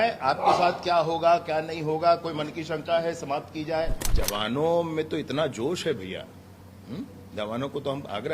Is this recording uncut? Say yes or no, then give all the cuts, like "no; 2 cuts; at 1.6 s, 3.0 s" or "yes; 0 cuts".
no; 1 cut; at 4.0 s